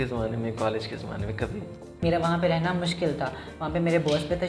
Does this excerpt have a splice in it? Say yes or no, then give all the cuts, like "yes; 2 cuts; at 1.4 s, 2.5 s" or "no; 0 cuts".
yes; 1 cut; at 2.0 s